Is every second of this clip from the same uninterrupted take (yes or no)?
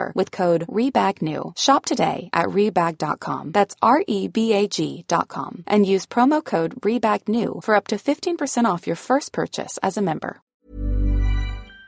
no